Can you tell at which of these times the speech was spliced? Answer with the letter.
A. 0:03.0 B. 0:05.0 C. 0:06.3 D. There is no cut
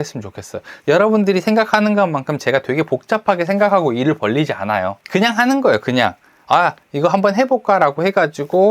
B